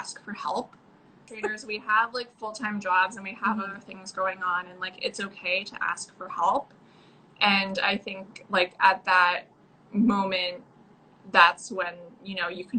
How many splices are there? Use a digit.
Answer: 1